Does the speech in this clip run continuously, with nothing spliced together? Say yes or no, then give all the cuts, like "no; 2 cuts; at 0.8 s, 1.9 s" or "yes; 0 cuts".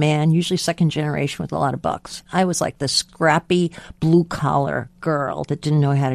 no; 2 cuts; at 2.2 s, 3.0 s